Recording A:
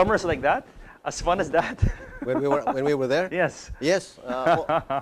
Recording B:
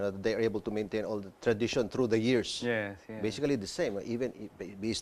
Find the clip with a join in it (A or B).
A